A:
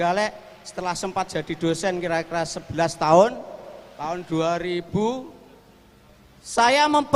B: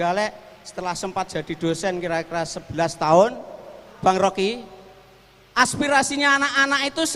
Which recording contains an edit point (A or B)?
B